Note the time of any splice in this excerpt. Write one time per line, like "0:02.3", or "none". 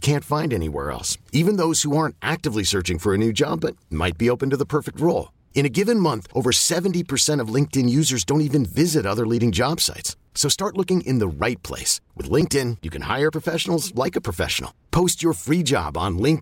none

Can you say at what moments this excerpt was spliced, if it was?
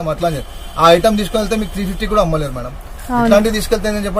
none

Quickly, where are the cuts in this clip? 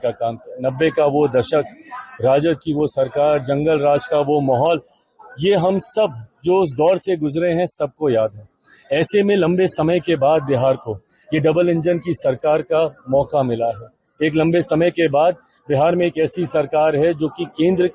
none

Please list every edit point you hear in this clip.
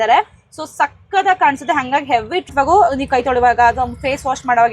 0:02.5

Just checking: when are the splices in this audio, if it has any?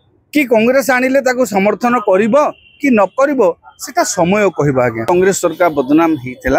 0:05.1

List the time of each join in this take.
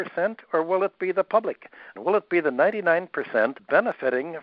0:01.9
0:03.6

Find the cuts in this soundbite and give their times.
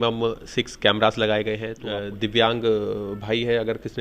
0:01.7

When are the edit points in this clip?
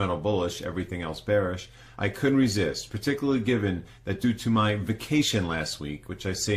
0:03.7

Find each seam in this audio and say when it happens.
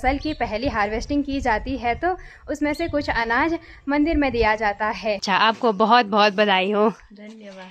0:05.4

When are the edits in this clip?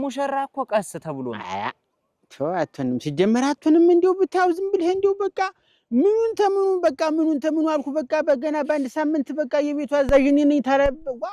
none

